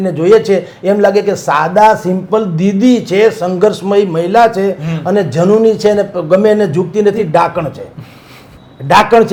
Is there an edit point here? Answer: no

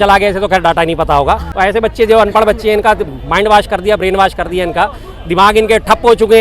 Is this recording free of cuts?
no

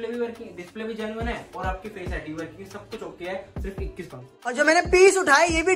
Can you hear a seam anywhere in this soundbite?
yes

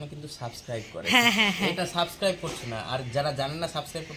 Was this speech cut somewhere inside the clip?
no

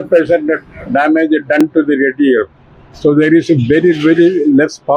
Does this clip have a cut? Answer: no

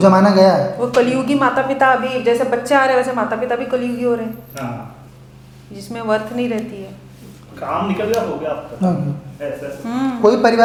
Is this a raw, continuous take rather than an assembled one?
yes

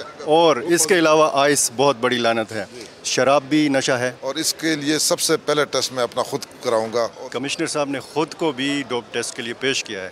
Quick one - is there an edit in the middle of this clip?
yes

